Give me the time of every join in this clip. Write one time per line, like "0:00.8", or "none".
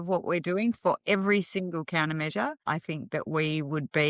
0:02.6